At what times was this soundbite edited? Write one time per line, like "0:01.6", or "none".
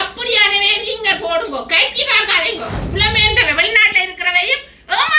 0:02.8